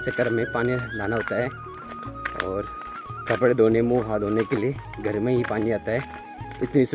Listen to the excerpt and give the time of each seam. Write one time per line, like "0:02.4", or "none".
none